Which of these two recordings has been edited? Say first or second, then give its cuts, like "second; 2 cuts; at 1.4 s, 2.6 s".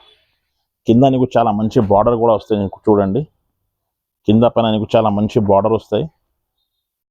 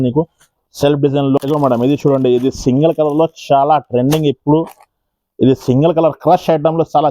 second; 1 cut; at 1.4 s